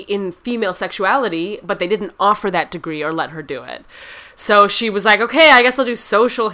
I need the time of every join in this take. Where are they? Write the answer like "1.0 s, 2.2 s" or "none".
none

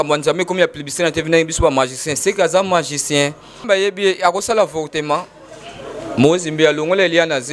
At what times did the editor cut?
3.6 s

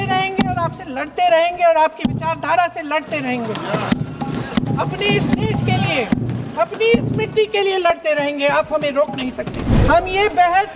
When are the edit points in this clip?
9.6 s

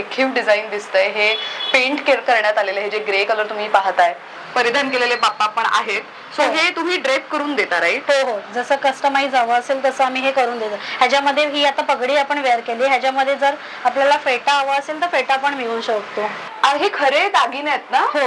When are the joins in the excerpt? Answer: 4.3 s, 16.4 s

